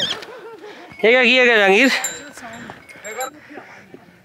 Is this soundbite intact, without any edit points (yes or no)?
no